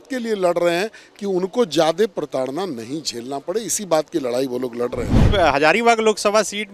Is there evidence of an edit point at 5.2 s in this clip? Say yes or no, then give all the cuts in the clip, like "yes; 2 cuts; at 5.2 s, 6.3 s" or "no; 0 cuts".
yes; 1 cut; at 5.2 s